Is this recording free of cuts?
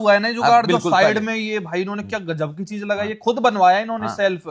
yes; 0 cuts

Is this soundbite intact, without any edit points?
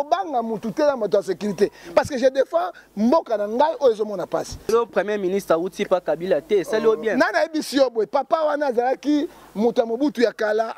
no; 1 cut; at 4.7 s

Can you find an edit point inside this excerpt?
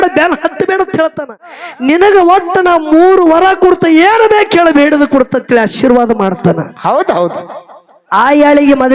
yes; 1 cut; at 1.5 s

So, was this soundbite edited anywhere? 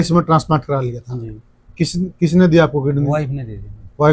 no; 0 cuts

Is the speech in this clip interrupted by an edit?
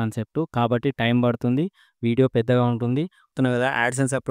yes; 1 cut; at 3.3 s

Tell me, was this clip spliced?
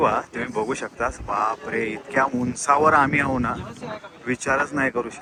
no; 0 cuts

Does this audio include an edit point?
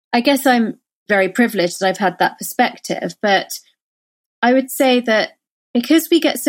yes; 1 cut; at 1.1 s

